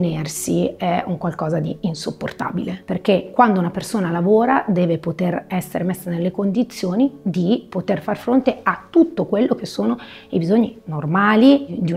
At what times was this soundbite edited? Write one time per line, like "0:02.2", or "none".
0:02.7